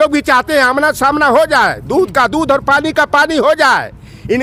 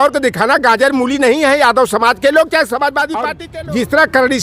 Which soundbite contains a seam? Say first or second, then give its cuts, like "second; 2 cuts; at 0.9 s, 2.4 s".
second; 1 cut; at 3.4 s